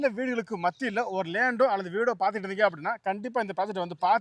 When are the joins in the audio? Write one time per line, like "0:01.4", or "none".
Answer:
none

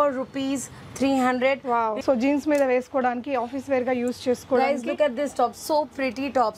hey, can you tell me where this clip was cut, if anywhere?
0:02.0

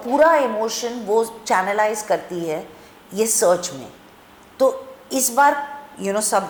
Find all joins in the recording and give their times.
none

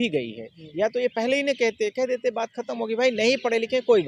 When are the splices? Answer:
none

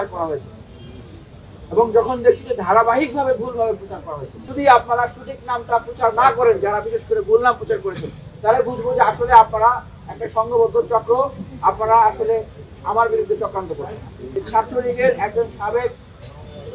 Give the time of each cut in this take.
0:04.4
0:14.4

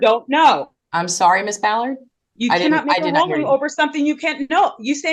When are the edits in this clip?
none

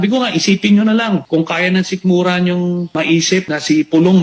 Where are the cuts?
0:01.2
0:03.3

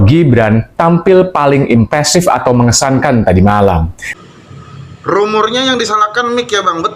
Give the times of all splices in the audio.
0:04.0

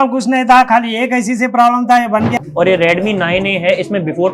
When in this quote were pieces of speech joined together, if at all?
0:02.3

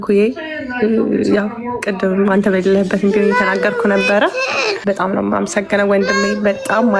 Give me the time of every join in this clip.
0:04.8

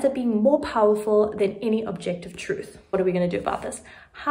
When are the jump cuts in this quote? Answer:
0:02.7

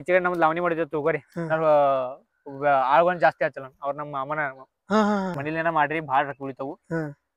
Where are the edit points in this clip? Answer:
0:05.4

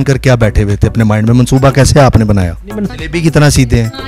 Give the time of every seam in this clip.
0:02.9

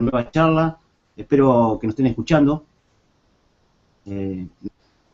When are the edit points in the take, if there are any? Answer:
none

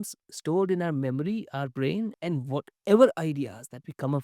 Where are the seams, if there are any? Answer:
0:02.2

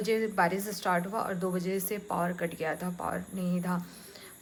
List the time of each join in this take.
none

